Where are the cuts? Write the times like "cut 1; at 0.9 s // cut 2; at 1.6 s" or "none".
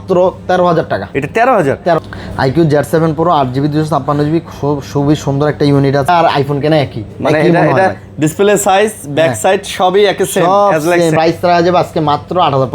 cut 1; at 2.0 s // cut 2; at 6.1 s // cut 3; at 11.1 s